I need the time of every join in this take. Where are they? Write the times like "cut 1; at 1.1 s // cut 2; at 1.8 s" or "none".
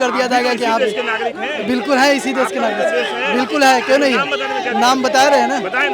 none